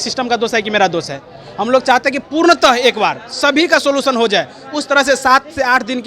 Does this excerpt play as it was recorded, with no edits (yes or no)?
yes